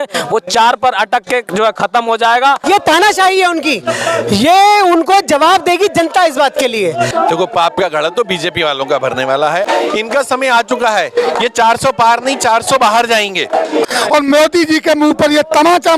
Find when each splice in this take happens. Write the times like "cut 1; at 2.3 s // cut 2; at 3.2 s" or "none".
cut 1; at 2.6 s // cut 2; at 7.1 s // cut 3; at 9.6 s // cut 4; at 13.9 s